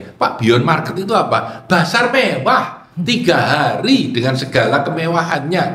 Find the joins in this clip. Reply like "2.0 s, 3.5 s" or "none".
none